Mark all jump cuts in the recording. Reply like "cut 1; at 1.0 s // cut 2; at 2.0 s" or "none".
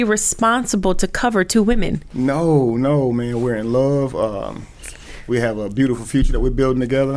cut 1; at 2.0 s